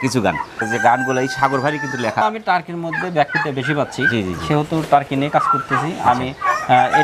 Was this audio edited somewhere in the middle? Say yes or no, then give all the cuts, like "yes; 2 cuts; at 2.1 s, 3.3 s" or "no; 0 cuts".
yes; 1 cut; at 2.3 s